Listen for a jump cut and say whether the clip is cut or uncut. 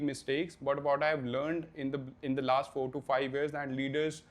uncut